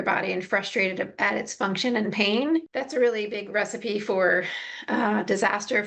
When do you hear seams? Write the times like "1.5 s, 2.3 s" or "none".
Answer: 2.7 s